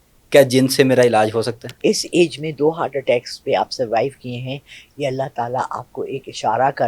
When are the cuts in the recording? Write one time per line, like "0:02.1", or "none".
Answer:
0:01.6